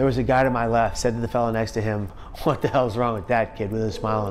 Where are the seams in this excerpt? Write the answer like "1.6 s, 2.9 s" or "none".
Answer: 1.0 s, 2.2 s